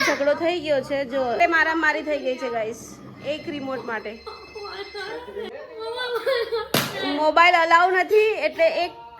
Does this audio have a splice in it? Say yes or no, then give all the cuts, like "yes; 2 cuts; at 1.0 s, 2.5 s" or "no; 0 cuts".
yes; 2 cuts; at 1.3 s, 5.5 s